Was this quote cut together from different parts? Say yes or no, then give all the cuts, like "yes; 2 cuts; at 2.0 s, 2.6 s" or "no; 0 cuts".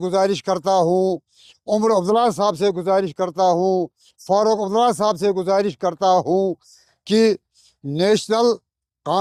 no; 0 cuts